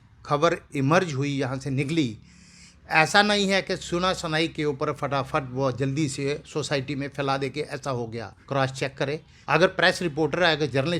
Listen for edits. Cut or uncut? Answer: cut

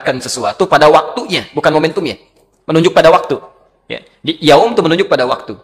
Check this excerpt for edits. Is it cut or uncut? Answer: uncut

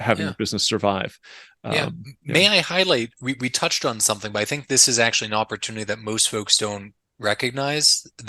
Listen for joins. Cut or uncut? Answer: cut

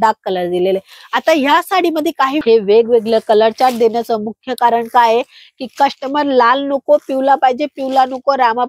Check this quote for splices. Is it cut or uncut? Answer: cut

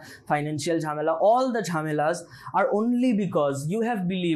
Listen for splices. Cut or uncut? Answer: uncut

